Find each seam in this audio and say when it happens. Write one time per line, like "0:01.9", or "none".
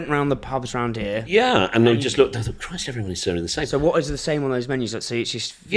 none